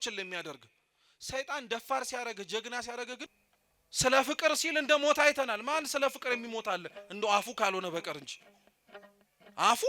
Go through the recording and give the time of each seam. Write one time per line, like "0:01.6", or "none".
0:03.3